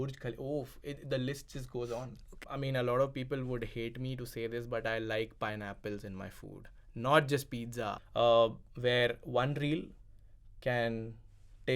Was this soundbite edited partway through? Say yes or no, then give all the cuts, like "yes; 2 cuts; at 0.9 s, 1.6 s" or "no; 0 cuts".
yes; 2 cuts; at 2.4 s, 8.0 s